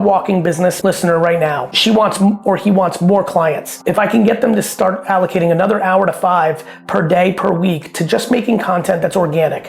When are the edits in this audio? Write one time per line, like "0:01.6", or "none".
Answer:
0:00.8
0:01.8
0:03.7